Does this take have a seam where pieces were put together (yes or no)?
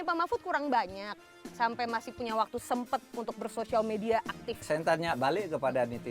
no